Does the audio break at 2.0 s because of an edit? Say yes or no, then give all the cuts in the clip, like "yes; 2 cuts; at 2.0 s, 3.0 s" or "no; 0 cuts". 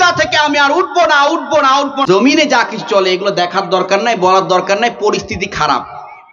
yes; 1 cut; at 2.0 s